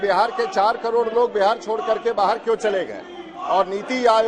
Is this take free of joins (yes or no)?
yes